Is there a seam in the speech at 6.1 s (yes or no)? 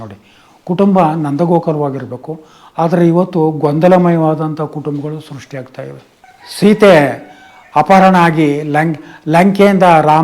yes